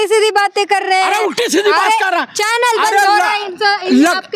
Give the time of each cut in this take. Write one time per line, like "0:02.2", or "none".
none

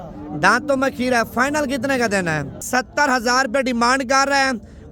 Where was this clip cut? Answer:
0:02.6

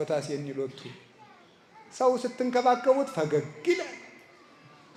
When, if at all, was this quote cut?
none

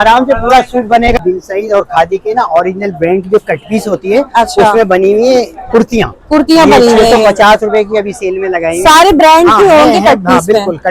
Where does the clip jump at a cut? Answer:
0:01.2

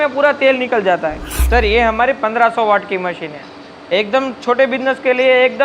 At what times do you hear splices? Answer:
0:01.3

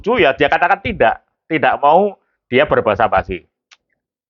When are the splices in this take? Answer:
none

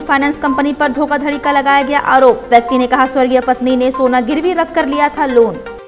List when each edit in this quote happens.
none

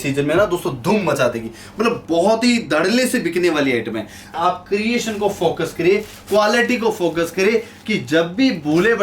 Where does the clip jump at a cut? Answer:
0:04.4

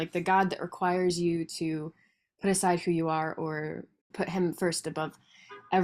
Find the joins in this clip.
0:04.1

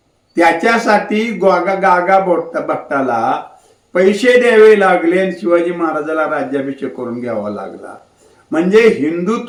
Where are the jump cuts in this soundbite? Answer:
none

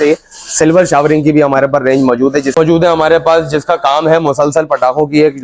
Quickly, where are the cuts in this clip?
0:02.6

